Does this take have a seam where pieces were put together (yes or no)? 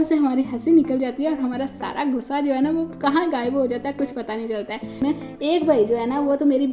yes